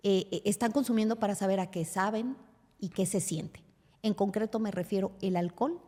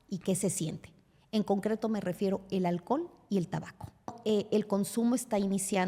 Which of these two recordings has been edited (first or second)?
second